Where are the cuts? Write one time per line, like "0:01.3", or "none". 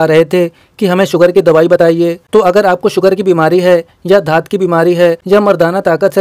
none